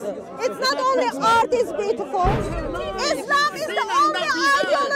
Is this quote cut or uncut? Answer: cut